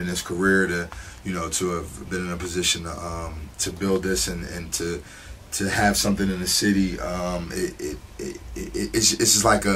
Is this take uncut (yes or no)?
yes